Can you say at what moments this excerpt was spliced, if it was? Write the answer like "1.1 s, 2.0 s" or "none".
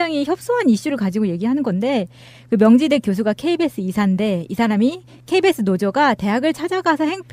none